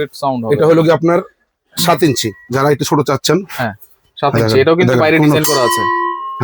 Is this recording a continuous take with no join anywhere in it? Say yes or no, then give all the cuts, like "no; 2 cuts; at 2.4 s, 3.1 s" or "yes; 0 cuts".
yes; 0 cuts